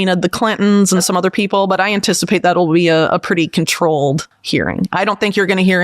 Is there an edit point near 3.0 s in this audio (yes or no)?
no